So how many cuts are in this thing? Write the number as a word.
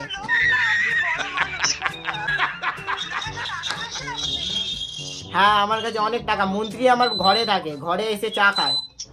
one